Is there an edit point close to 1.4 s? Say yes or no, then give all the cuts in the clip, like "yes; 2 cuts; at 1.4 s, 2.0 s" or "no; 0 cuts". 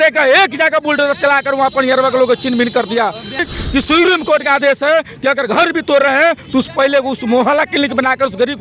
no; 1 cut; at 3.5 s